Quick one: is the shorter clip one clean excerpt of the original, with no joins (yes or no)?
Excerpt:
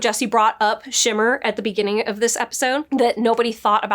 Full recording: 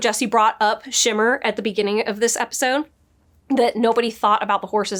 no